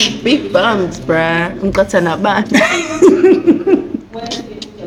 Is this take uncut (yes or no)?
yes